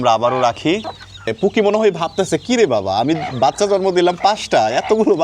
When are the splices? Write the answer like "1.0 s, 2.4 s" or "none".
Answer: 1.3 s

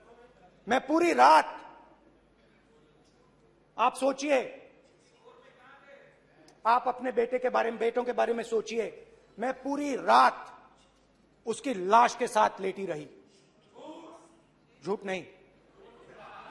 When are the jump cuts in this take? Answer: none

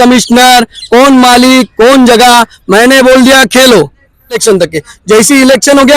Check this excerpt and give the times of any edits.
4.4 s

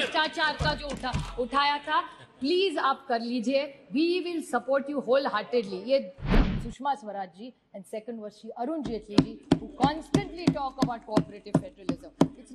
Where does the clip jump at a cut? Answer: 6.3 s

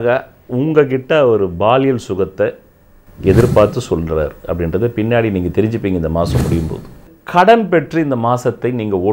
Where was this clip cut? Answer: 7.1 s

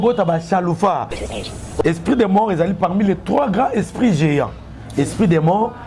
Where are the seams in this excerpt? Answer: 1.2 s

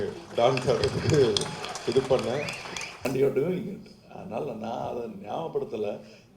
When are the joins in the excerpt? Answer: 3.1 s

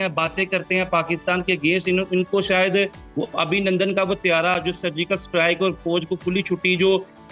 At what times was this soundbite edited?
none

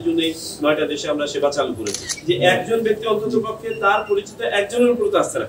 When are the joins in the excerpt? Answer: 2.1 s

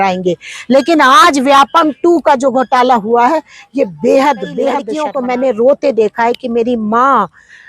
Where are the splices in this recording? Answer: 5.0 s

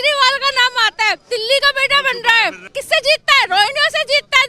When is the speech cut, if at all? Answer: 1.2 s, 2.7 s

